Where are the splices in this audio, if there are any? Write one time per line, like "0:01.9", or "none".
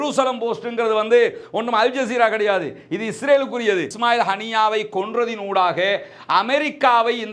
0:03.9